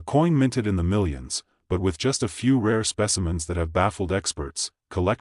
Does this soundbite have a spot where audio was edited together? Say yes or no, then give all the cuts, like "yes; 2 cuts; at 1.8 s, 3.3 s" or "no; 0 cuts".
no; 0 cuts